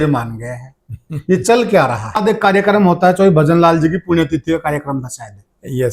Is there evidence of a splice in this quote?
yes; 1 cut; at 2.2 s

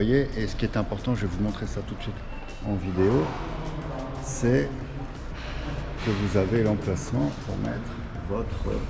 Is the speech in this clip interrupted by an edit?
no; 0 cuts

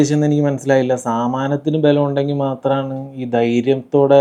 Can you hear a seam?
no; 0 cuts

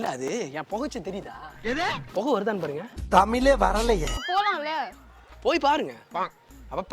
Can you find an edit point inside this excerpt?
yes; 2 cuts; at 2.9 s, 4.2 s

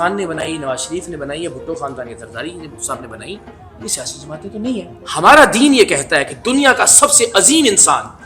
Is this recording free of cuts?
no; 1 cut; at 5.0 s

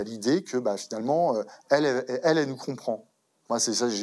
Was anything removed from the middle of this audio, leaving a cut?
no; 0 cuts

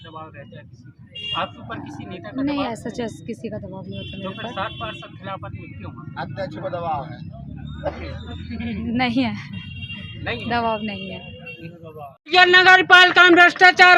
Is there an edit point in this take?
yes; 1 cut; at 12.3 s

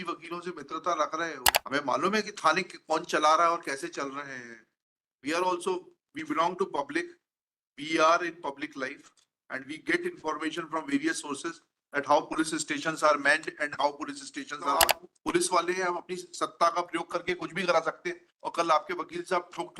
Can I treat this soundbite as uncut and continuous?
no; 2 cuts; at 1.5 s, 14.8 s

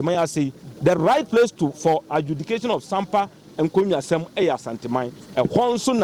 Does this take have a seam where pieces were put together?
no; 0 cuts

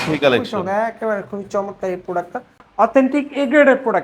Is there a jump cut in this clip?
yes; 1 cut; at 2.6 s

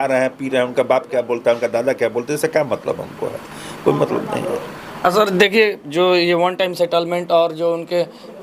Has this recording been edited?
no; 0 cuts

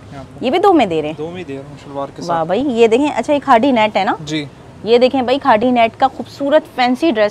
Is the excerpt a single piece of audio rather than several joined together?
yes; 0 cuts

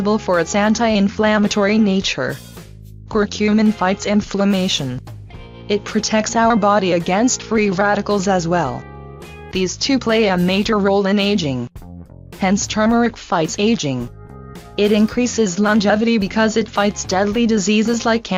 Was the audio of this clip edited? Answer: no; 0 cuts

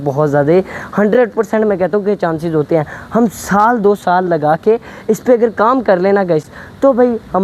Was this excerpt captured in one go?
yes; 0 cuts

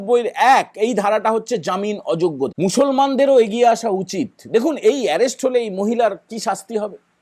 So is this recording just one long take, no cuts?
no; 1 cut; at 2.5 s

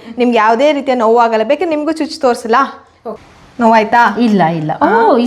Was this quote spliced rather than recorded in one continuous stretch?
yes; 1 cut; at 3.0 s

